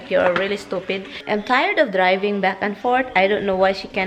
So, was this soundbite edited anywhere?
yes; 1 cut; at 1.1 s

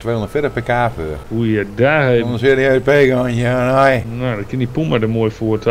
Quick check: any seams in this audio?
yes; 2 cuts; at 1.2 s, 4.1 s

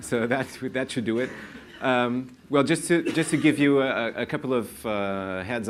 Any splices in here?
no; 0 cuts

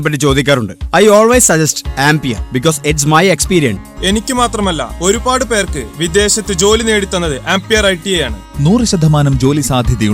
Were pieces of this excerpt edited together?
yes; 1 cut; at 3.8 s

